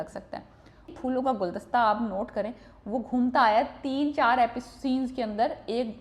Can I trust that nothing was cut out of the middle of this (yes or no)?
no